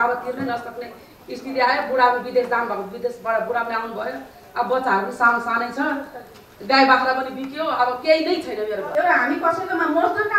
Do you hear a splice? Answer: yes; 1 cut; at 8.9 s

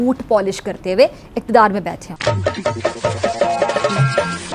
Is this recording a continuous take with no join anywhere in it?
yes; 0 cuts

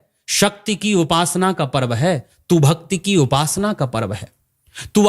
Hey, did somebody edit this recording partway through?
no; 0 cuts

